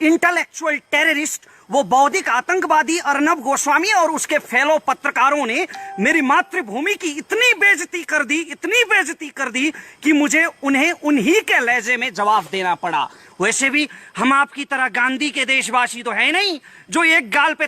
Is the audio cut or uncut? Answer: uncut